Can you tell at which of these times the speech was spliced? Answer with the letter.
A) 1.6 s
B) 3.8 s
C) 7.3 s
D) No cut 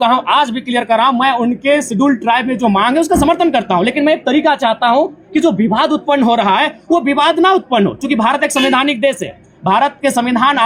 D